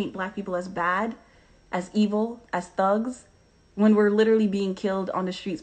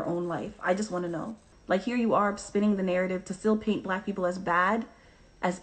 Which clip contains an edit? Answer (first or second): second